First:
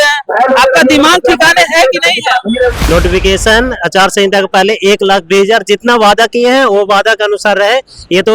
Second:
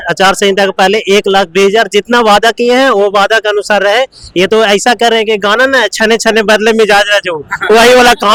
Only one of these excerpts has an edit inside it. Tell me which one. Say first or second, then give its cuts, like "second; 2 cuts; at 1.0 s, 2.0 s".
first; 1 cut; at 2.8 s